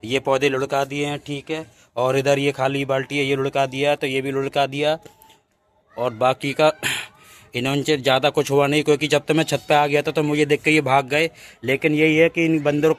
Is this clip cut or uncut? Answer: uncut